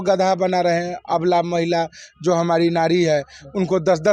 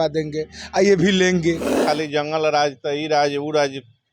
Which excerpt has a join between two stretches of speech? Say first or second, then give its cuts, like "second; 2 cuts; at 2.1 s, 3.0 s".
second; 1 cut; at 1.8 s